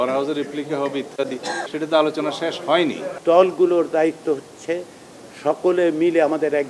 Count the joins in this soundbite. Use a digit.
2